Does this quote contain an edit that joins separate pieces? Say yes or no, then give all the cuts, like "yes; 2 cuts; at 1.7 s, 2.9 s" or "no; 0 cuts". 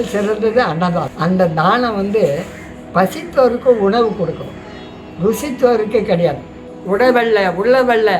yes; 2 cuts; at 1.1 s, 6.7 s